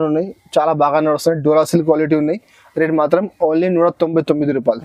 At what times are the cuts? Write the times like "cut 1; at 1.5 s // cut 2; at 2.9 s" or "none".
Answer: none